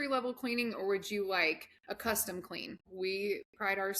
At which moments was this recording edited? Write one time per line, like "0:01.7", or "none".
0:02.8